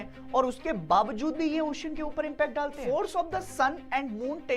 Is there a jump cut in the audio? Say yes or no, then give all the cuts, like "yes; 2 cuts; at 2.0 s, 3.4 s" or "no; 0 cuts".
yes; 1 cut; at 2.8 s